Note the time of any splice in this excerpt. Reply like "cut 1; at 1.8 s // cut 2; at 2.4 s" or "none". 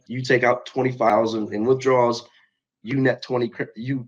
cut 1; at 1.1 s